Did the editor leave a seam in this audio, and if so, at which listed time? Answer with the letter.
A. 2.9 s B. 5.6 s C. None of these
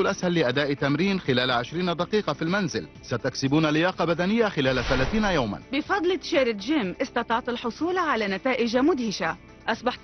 B